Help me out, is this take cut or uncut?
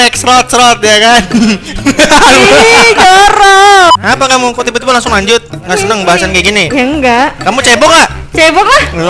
uncut